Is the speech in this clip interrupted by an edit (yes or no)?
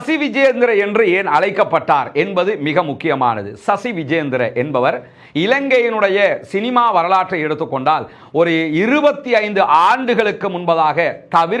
no